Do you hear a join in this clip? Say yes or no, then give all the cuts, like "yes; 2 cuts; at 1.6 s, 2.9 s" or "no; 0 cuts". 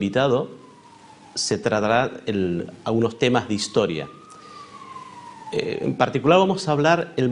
yes; 1 cut; at 4.7 s